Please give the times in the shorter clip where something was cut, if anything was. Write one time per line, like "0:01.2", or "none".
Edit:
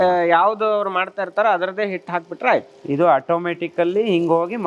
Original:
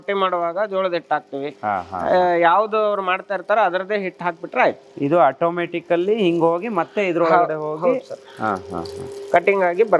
none

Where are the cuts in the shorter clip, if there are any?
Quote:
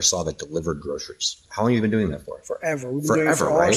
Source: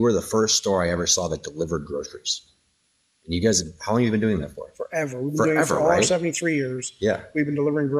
0:01.4

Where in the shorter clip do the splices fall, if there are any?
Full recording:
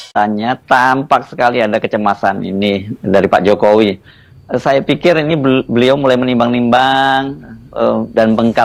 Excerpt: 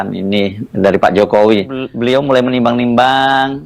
0:01.9

